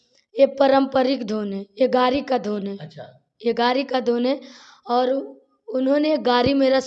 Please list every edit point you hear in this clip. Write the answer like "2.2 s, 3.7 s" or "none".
none